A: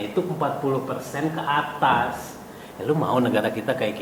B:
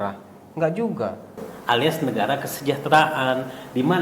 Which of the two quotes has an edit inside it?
B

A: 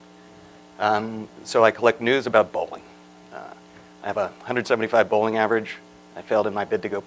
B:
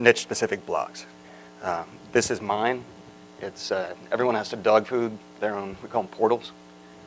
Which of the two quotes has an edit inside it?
B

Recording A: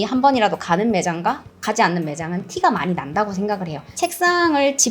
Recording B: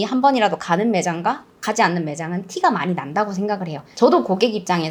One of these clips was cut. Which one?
A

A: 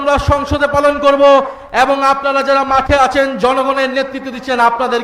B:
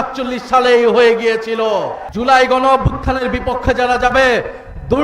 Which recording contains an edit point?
B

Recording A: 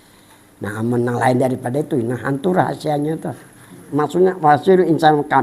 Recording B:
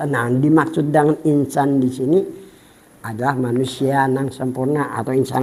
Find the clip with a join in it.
A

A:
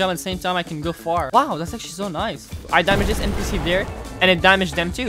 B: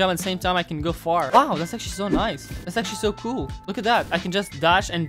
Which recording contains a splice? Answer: A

